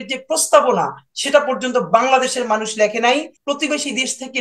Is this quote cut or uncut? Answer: cut